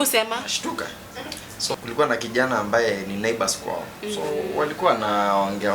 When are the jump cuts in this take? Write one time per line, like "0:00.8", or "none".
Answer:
0:01.7